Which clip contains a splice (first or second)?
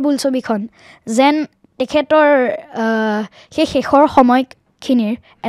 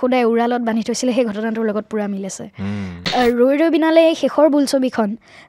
second